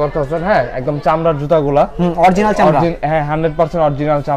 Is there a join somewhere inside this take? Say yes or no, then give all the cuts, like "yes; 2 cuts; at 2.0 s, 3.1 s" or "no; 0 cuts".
no; 0 cuts